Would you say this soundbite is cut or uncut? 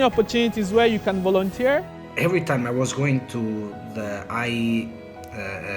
cut